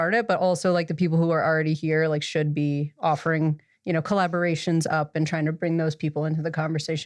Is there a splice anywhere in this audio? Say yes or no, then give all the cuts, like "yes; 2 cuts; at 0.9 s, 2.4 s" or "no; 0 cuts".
no; 0 cuts